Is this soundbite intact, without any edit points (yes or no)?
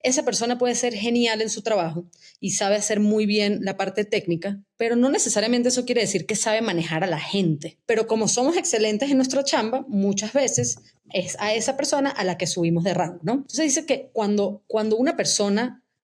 no